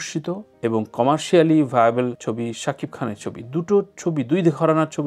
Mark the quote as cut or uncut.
uncut